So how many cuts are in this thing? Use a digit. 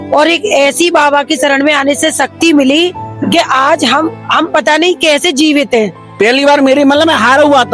1